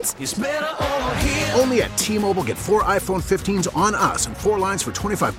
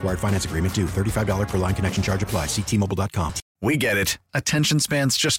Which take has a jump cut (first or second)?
second